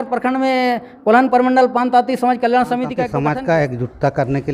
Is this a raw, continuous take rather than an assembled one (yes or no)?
no